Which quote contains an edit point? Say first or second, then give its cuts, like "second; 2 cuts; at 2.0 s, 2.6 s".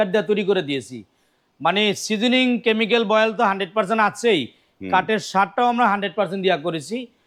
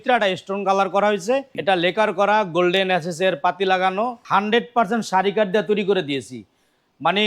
second; 2 cuts; at 1.5 s, 4.2 s